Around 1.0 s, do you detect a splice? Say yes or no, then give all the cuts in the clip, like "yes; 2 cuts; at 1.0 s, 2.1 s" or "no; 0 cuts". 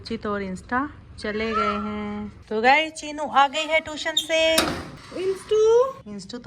no; 1 cut; at 2.3 s